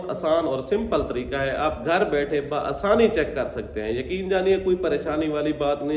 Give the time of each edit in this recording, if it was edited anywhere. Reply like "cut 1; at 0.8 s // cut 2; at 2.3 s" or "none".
none